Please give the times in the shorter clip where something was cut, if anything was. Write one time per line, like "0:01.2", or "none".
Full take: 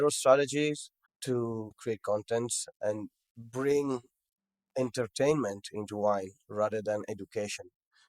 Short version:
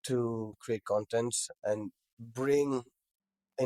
none

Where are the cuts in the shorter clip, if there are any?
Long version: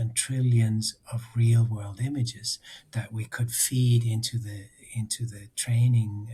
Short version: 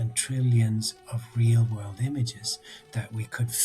none

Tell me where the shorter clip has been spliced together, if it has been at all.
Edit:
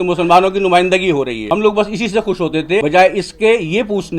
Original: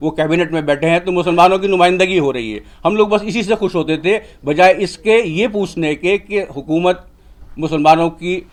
0:01.4
0:02.8

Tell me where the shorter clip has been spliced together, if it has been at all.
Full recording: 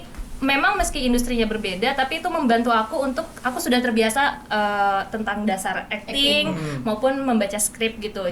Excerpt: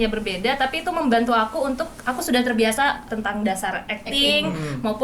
0:03.1

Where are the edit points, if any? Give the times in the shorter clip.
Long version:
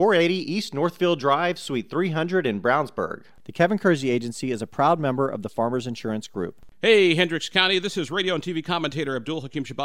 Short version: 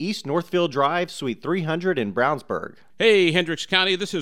0:02.8

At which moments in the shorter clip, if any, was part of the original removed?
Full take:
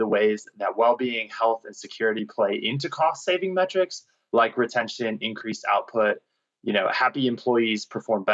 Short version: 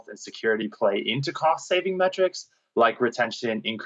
none

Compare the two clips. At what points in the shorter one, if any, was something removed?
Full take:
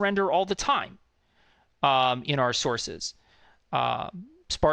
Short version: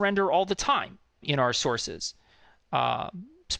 0:01.2

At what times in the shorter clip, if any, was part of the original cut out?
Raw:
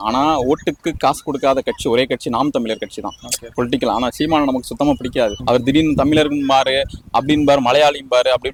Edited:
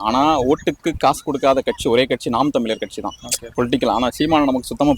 none

